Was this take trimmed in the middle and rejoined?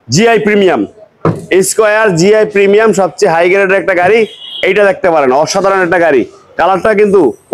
no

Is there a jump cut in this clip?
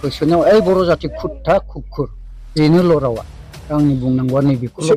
no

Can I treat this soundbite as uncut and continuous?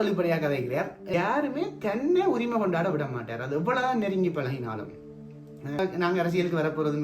no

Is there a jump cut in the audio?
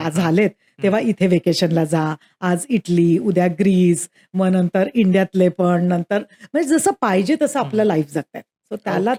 no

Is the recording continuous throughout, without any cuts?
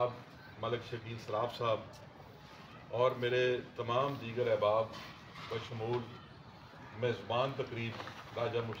yes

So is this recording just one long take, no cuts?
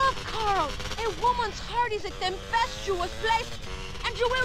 yes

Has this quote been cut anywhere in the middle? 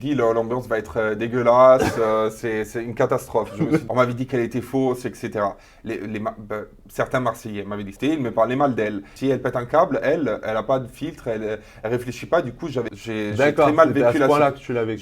yes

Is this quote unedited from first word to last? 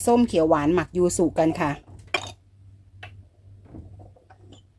no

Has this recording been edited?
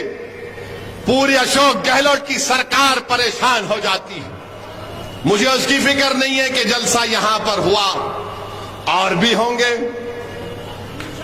no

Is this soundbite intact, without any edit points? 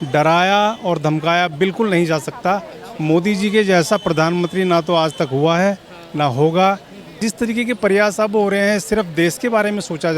no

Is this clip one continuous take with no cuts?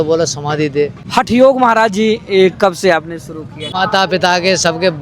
no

